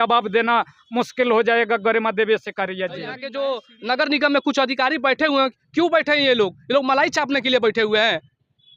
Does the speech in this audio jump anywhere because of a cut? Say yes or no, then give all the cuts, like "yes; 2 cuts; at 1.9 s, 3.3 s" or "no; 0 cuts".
yes; 1 cut; at 3.3 s